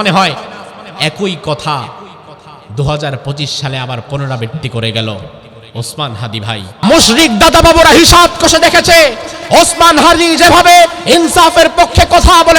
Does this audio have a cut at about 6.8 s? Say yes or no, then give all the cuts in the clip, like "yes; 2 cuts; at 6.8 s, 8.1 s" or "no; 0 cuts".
yes; 1 cut; at 6.8 s